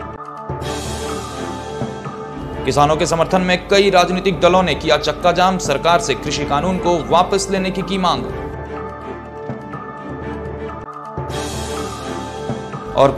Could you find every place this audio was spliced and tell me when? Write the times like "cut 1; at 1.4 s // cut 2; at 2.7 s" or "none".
cut 1; at 2.1 s